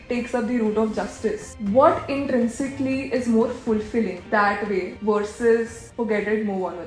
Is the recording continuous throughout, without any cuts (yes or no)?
no